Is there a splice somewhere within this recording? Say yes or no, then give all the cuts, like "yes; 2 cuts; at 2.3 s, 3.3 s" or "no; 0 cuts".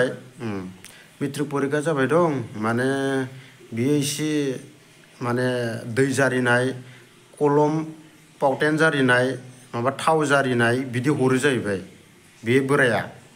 yes; 1 cut; at 12.3 s